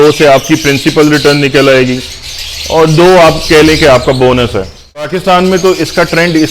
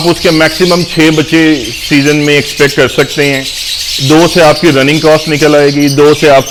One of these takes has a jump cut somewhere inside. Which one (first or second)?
first